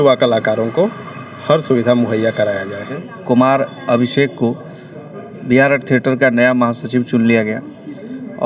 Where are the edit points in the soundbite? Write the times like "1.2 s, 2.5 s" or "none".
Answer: 3.1 s